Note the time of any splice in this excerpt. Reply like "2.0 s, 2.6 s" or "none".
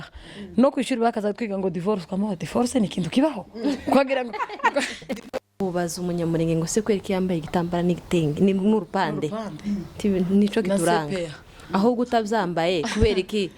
5.4 s